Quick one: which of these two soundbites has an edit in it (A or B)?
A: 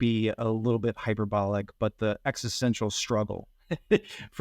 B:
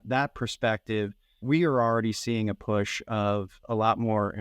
B